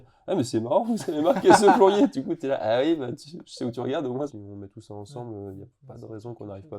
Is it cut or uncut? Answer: cut